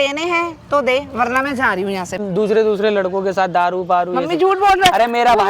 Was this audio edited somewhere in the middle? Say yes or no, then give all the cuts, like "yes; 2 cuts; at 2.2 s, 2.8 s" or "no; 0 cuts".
yes; 1 cut; at 2.2 s